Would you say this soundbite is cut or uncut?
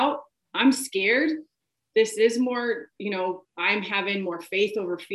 cut